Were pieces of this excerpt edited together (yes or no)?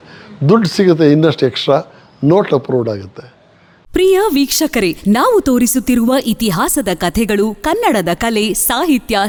no